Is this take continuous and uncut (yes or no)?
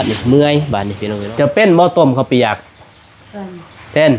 no